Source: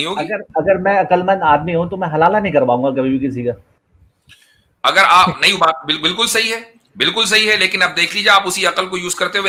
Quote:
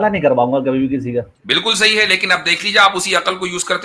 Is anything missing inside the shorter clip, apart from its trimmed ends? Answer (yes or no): yes